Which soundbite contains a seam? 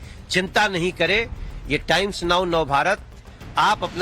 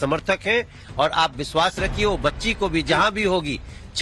first; 1 cut; at 2.5 s

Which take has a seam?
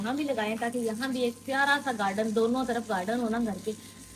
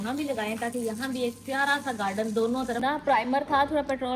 second; 1 cut; at 2.8 s

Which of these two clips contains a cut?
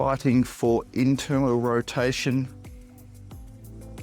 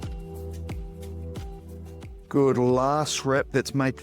second; 1 cut; at 2.2 s

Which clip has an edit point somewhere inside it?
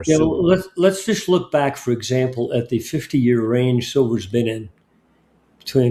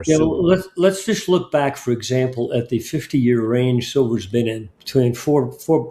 second; 1 cut; at 4.7 s

